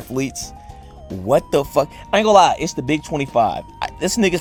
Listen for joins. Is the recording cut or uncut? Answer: uncut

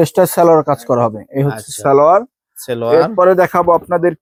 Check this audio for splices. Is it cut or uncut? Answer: uncut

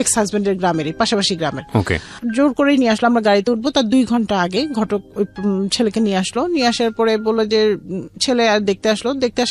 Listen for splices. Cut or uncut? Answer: uncut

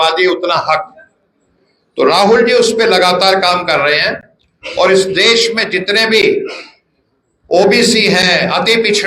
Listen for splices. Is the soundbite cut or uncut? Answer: uncut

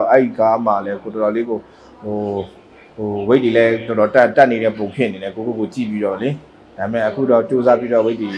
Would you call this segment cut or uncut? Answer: uncut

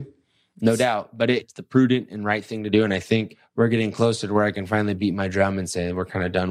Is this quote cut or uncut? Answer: cut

